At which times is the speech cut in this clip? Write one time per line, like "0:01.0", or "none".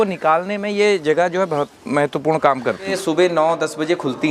0:02.9